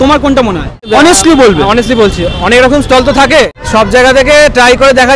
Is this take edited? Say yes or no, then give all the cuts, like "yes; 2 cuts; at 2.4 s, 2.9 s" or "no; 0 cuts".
no; 0 cuts